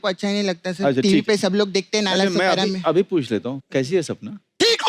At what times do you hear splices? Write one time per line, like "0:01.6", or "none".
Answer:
0:03.6